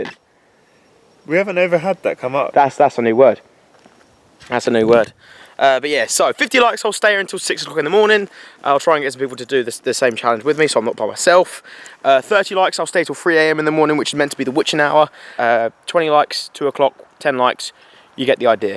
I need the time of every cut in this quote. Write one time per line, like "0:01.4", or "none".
0:15.2

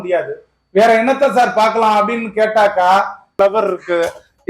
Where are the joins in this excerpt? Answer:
0:03.3

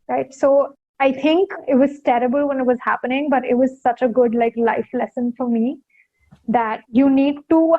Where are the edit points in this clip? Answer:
0:01.3
0:06.8

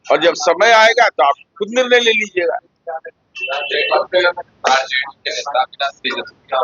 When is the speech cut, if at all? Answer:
none

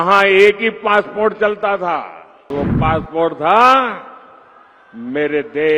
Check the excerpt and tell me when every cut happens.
0:02.5

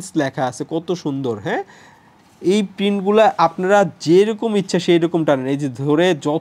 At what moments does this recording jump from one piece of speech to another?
none

